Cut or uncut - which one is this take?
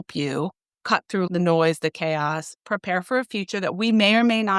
cut